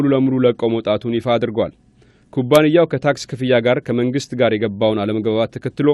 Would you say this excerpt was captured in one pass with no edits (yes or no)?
no